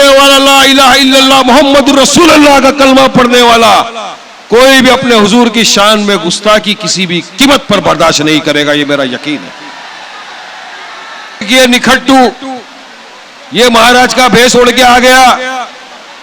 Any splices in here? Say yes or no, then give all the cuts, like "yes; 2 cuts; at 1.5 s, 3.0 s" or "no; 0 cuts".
yes; 1 cut; at 11.5 s